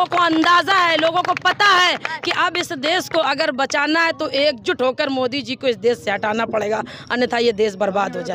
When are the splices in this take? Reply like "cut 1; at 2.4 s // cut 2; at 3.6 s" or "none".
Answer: none